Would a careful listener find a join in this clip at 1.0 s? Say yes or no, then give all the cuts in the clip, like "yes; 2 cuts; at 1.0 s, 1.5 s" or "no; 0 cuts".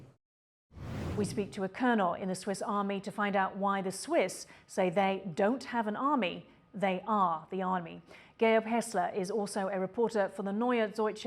yes; 1 cut; at 1.0 s